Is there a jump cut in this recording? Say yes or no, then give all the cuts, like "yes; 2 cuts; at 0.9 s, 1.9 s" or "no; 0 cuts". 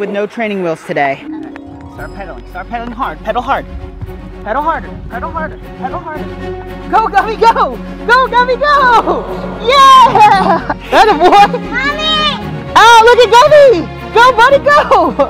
yes; 1 cut; at 1.3 s